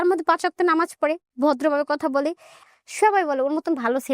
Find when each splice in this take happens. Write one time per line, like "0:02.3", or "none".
0:02.6

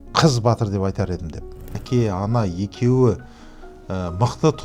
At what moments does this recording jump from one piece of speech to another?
0:01.8

